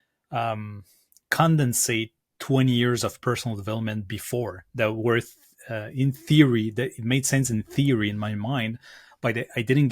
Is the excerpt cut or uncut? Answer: uncut